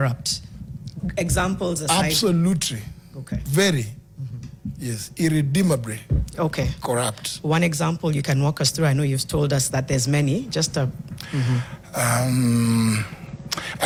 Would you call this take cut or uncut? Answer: uncut